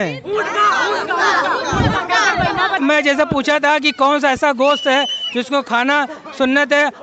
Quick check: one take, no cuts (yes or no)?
no